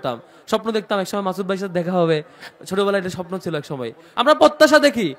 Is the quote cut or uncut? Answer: cut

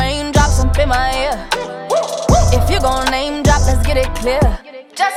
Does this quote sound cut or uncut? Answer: uncut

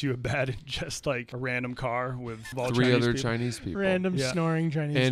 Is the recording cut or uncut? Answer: cut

